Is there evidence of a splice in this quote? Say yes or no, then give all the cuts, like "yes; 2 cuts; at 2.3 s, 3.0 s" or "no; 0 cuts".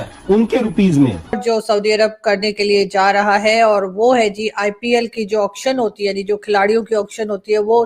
yes; 1 cut; at 1.3 s